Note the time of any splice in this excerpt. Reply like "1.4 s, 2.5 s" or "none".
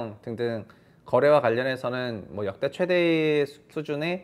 none